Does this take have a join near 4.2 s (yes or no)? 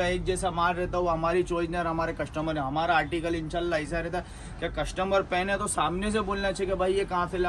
no